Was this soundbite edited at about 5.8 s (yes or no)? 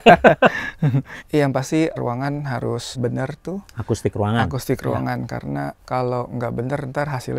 no